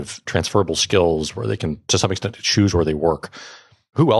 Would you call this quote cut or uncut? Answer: cut